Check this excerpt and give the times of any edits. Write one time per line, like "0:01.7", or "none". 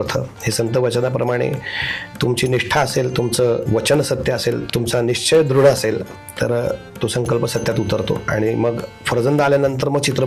0:03.7
0:04.6